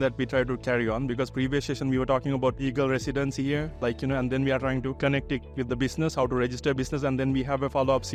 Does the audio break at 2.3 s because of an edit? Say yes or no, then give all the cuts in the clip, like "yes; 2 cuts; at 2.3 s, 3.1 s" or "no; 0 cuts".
no; 0 cuts